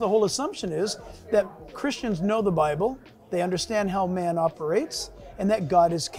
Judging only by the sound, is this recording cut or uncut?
uncut